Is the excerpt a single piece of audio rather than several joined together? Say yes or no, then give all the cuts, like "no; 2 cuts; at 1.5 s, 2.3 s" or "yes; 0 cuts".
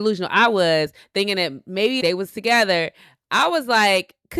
no; 1 cut; at 2.0 s